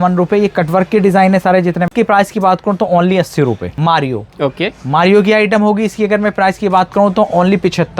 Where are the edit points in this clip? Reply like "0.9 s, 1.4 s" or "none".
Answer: 1.9 s, 3.7 s